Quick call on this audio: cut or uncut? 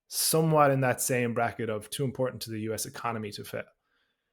cut